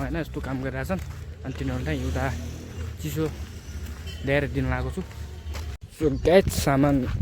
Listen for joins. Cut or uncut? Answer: cut